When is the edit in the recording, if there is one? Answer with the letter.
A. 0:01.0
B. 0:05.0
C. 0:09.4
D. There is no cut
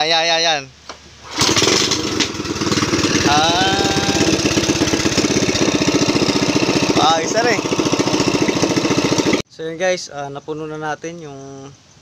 C